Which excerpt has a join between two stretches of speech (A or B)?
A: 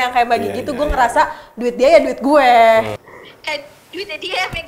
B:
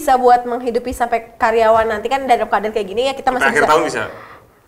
A